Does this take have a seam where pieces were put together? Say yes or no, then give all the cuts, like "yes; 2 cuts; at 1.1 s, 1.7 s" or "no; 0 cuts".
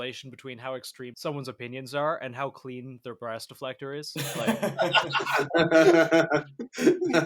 yes; 1 cut; at 1.0 s